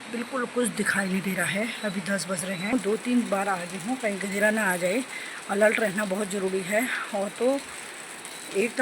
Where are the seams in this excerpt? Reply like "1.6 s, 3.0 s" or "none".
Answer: 2.7 s